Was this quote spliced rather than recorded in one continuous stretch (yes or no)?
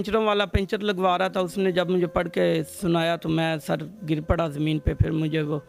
no